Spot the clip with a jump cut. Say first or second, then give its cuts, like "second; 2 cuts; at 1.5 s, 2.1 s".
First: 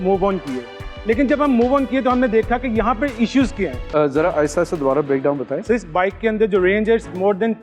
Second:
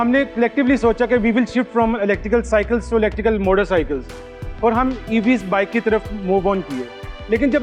first; 1 cut; at 3.8 s